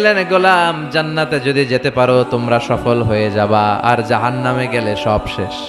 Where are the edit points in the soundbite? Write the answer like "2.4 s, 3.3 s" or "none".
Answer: none